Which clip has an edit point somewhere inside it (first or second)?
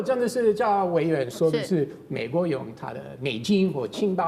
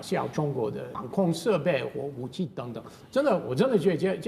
second